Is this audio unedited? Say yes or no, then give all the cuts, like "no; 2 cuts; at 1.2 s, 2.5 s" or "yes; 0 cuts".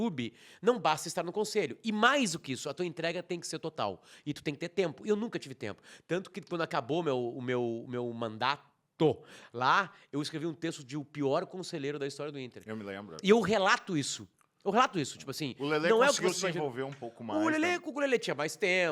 yes; 0 cuts